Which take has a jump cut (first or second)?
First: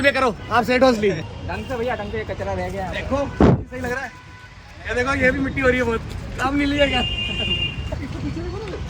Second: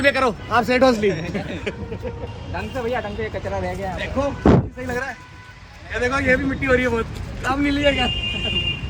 first